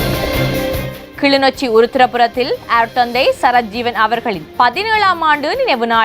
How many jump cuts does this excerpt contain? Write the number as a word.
two